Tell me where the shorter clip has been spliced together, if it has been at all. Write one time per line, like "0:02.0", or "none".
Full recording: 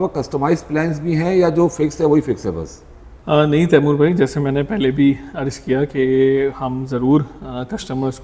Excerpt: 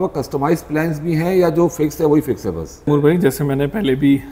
0:02.9